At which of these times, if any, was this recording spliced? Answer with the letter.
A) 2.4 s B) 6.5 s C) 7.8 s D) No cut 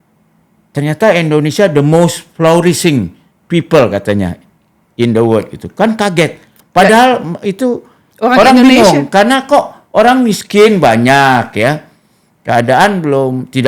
B